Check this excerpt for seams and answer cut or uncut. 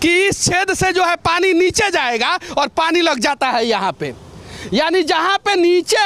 uncut